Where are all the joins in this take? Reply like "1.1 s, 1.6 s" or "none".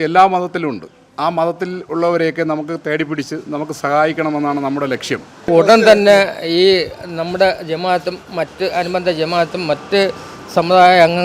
5.5 s